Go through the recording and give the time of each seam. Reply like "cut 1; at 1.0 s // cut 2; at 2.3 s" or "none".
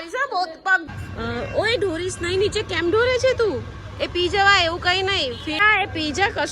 cut 1; at 0.8 s // cut 2; at 5.6 s